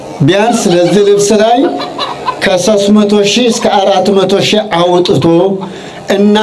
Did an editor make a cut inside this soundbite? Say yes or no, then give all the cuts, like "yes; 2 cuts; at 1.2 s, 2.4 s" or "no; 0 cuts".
no; 0 cuts